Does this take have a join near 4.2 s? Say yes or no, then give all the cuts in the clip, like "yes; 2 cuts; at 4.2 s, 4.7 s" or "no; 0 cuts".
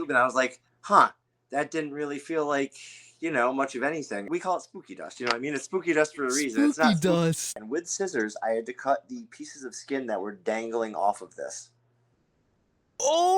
yes; 2 cuts; at 4.2 s, 7.5 s